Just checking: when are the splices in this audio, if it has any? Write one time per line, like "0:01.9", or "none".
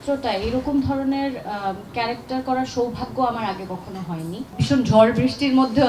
0:04.5